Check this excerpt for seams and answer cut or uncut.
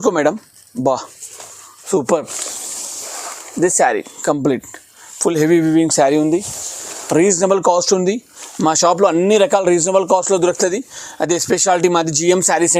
uncut